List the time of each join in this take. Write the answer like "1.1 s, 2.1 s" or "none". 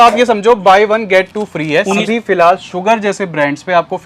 2.1 s